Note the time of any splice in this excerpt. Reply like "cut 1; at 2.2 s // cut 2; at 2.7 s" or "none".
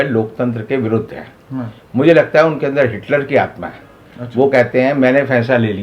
none